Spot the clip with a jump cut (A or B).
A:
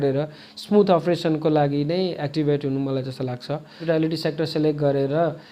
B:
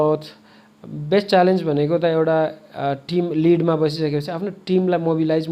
A